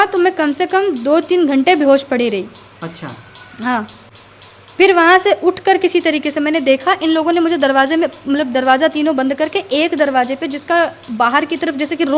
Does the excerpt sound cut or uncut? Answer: uncut